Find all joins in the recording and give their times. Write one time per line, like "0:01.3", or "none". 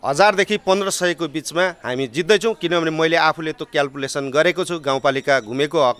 none

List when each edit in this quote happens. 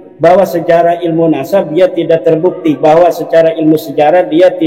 none

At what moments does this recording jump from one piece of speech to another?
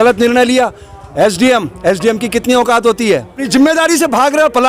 0:03.4

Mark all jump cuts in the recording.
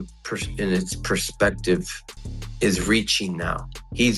0:02.2

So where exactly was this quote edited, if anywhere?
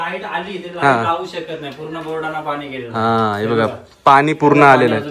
none

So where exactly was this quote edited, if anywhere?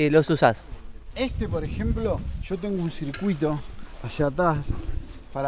none

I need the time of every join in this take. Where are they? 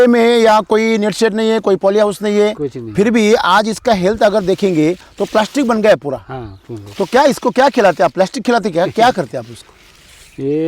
none

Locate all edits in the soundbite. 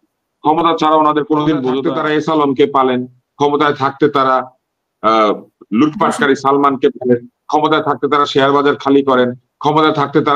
0:01.9

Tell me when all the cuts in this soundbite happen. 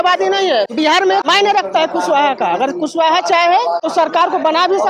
0:01.0
0:03.8

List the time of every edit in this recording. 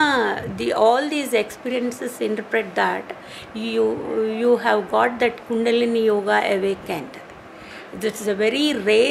none

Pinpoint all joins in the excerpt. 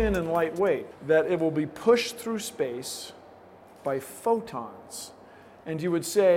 0:00.9

